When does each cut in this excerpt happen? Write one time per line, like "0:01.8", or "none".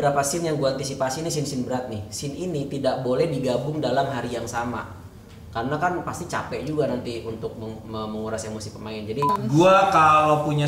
0:09.4